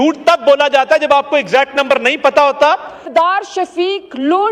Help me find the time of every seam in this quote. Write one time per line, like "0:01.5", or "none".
0:03.1

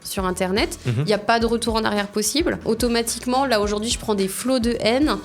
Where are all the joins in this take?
0:02.6

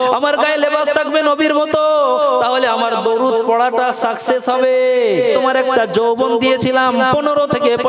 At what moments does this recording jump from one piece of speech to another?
0:05.3

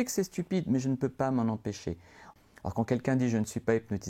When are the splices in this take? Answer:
0:02.3

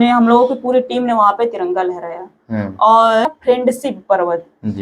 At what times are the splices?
0:03.3

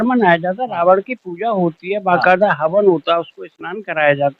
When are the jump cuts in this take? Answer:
none

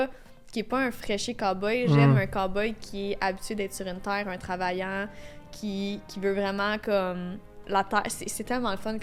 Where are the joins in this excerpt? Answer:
none

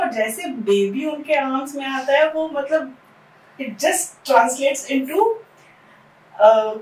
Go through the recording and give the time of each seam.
none

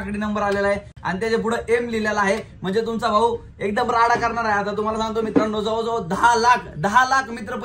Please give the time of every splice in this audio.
none

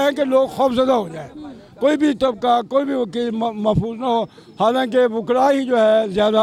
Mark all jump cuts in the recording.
none

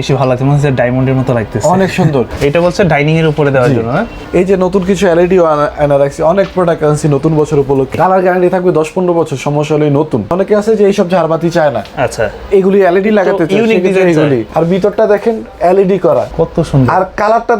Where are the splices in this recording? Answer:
0:02.3
0:04.2
0:07.9
0:10.3
0:14.5
0:16.3

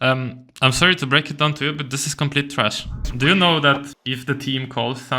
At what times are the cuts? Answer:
0:03.1
0:03.9

